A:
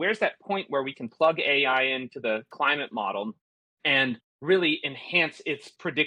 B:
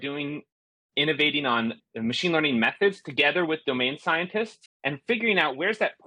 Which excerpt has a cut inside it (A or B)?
B